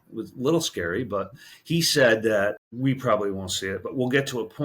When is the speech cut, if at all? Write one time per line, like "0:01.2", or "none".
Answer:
0:02.7